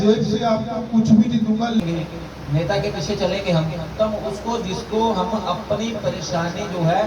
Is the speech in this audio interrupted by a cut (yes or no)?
yes